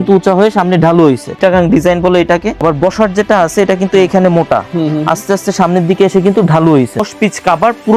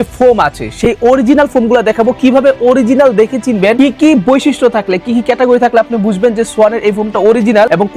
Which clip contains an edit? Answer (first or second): first